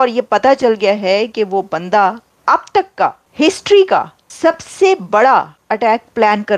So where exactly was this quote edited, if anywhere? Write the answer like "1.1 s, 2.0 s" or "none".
2.3 s, 3.2 s, 4.2 s, 5.6 s